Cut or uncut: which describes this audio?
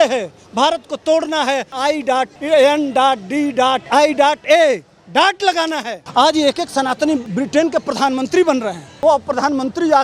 cut